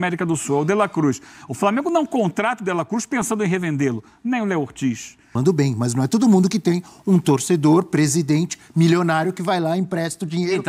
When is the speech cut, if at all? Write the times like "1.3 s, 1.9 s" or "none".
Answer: 5.3 s